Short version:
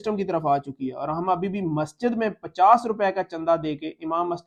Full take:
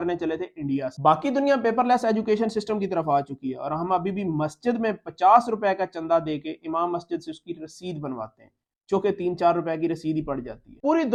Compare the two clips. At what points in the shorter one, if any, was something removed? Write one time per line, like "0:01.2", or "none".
none